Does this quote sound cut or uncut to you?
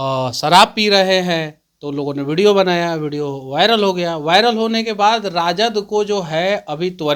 uncut